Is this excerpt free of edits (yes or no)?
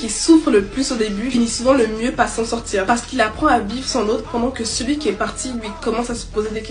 yes